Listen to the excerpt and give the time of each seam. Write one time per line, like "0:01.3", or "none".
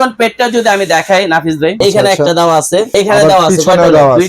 0:01.8
0:02.9